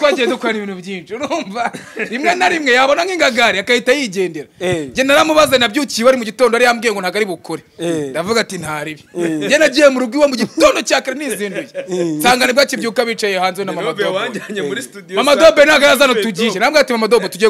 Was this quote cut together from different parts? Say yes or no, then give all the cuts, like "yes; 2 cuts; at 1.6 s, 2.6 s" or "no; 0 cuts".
no; 0 cuts